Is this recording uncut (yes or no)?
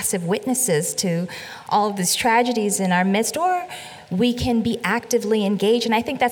yes